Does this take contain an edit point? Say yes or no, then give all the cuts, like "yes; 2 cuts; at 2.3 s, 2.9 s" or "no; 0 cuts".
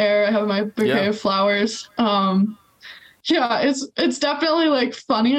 no; 0 cuts